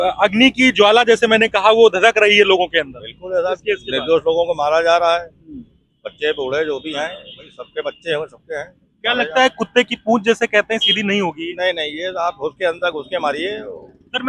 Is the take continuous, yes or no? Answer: yes